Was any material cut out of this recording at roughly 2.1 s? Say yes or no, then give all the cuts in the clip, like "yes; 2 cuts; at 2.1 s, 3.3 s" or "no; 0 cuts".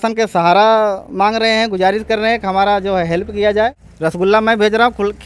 no; 1 cut; at 3.9 s